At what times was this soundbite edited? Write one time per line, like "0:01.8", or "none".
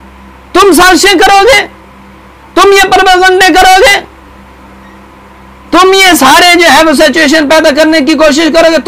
none